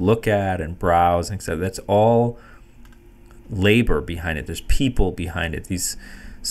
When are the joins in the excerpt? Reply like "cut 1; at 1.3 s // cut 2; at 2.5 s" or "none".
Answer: none